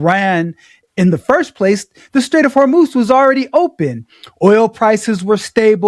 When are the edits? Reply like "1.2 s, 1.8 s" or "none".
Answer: none